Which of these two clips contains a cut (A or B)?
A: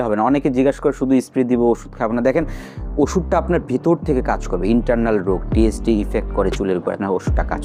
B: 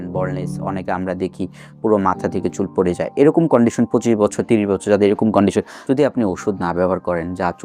B